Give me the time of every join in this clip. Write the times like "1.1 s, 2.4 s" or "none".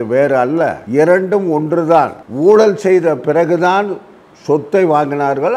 none